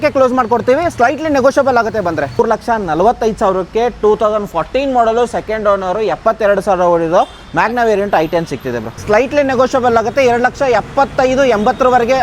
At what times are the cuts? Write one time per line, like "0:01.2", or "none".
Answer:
0:02.4
0:08.9

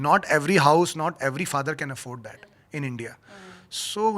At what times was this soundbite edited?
none

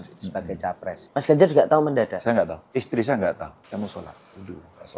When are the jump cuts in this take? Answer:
0:01.0
0:02.6
0:03.6

